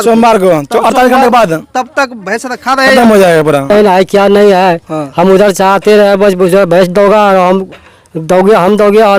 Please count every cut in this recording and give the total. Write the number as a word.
one